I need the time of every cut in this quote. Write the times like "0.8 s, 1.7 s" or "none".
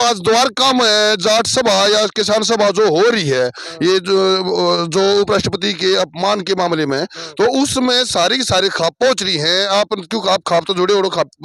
none